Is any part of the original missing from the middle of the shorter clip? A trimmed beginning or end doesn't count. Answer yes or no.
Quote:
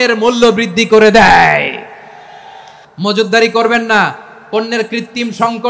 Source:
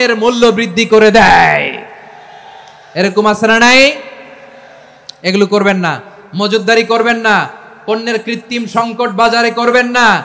yes